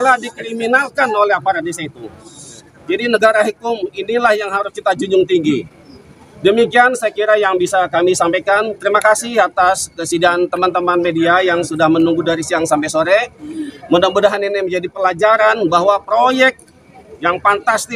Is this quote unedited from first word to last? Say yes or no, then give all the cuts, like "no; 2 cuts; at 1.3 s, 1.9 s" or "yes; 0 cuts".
yes; 0 cuts